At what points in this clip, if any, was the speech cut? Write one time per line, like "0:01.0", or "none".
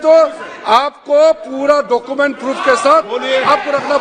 none